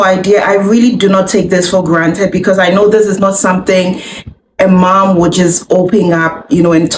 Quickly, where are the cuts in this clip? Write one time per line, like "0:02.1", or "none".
none